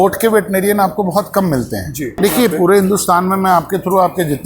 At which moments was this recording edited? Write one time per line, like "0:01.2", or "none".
0:02.2